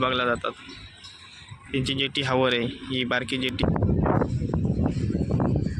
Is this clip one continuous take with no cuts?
no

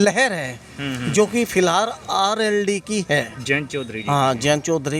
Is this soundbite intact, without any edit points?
yes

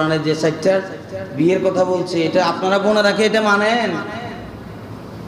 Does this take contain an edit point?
no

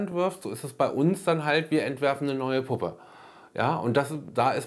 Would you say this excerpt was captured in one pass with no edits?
yes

